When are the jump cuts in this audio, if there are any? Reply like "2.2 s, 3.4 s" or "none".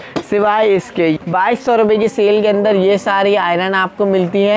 1.2 s